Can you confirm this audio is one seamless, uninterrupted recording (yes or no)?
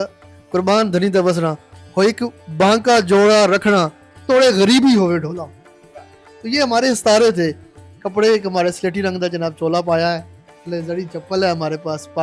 yes